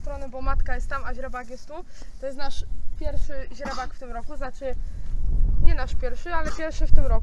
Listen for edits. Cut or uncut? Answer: uncut